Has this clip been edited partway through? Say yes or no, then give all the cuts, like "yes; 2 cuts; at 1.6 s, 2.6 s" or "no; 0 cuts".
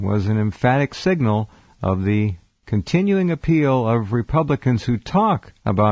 no; 0 cuts